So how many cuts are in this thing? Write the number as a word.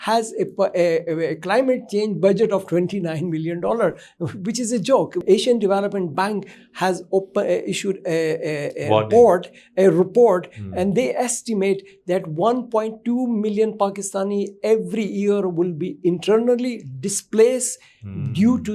one